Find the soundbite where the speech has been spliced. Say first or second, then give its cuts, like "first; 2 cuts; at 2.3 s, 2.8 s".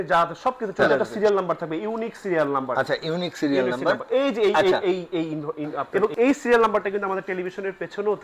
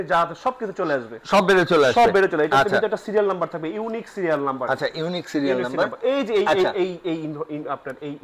first; 2 cuts; at 0.8 s, 5.8 s